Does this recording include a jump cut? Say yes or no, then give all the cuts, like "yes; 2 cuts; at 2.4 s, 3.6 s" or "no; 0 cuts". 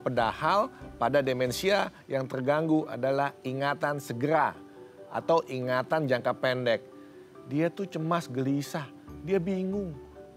no; 0 cuts